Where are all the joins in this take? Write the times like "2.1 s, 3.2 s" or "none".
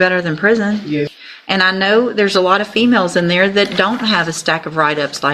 1.2 s